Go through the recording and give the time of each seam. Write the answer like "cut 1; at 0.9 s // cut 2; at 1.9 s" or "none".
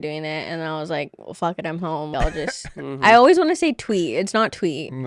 cut 1; at 2.1 s

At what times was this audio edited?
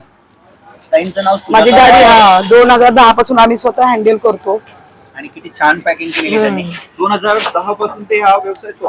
none

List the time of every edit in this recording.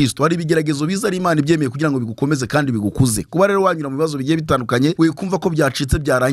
cut 1; at 4.9 s

